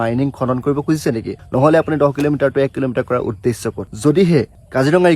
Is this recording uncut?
no; 1 cut; at 3.9 s

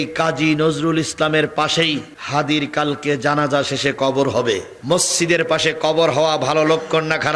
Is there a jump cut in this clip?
no; 0 cuts

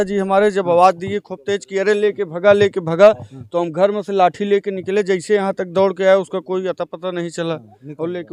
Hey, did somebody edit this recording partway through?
no; 0 cuts

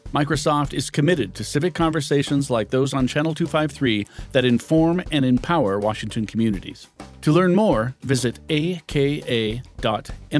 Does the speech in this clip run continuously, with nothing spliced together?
yes; 0 cuts

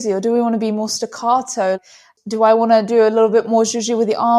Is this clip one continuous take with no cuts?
no; 1 cut; at 1.8 s

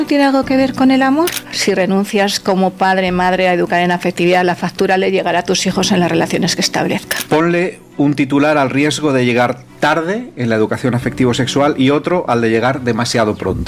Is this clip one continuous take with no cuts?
no; 2 cuts; at 1.5 s, 7.1 s

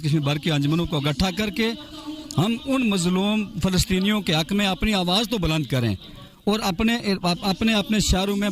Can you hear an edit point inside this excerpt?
no; 0 cuts

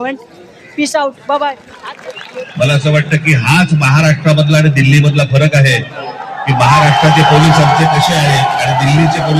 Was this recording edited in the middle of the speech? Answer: yes; 1 cut; at 1.7 s

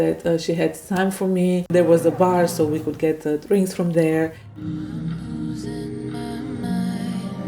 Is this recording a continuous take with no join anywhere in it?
no; 1 cut; at 1.7 s

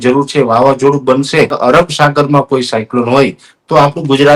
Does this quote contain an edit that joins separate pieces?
yes; 1 cut; at 1.5 s

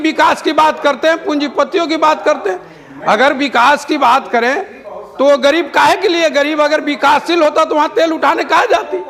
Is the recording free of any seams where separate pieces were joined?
yes; 0 cuts

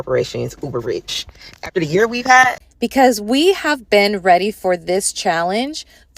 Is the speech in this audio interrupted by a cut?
yes; 1 cut; at 2.6 s

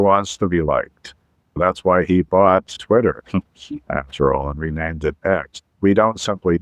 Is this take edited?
yes; 3 cuts; at 1.6 s, 2.7 s, 5.7 s

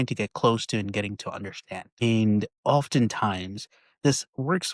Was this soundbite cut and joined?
no; 0 cuts

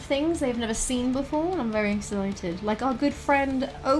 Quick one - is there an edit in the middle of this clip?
no; 0 cuts

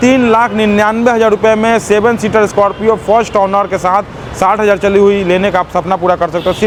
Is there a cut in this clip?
no; 0 cuts

